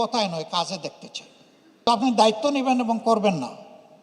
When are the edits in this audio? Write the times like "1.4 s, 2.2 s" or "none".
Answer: 1.9 s